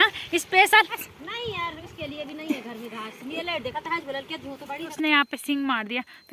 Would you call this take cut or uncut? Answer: cut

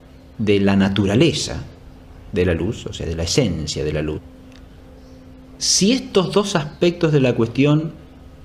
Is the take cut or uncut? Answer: uncut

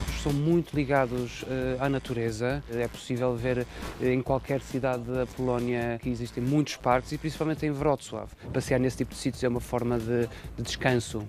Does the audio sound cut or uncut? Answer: cut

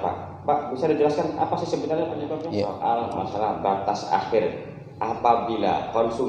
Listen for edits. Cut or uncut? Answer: cut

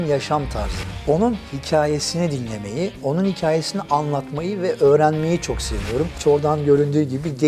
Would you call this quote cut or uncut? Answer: cut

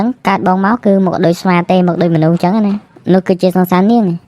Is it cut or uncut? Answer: cut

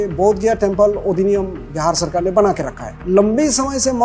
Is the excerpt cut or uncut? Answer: cut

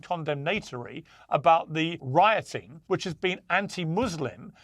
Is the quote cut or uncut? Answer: cut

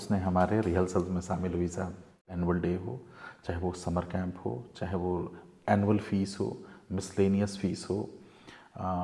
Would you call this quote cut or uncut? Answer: cut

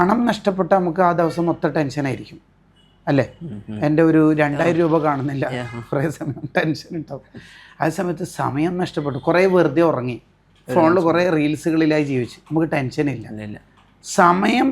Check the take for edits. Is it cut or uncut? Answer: uncut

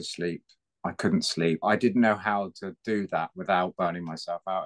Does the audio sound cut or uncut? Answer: cut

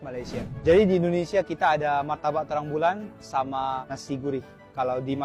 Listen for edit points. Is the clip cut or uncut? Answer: uncut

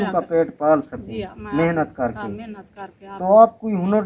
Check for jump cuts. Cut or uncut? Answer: uncut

